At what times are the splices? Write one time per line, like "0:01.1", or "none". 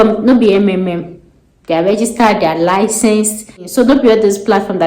0:03.6